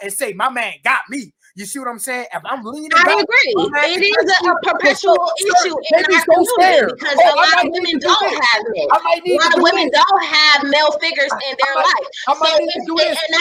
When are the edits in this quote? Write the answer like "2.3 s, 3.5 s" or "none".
none